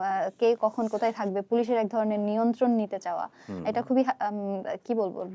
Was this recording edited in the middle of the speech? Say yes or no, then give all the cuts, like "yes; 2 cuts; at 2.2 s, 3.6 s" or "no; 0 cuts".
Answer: no; 0 cuts